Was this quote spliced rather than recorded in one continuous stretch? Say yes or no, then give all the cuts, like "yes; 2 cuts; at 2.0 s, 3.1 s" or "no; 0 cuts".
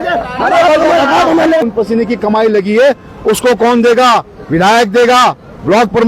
yes; 1 cut; at 1.6 s